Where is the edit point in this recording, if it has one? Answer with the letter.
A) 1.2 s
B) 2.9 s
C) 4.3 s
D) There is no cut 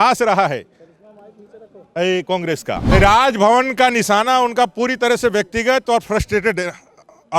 B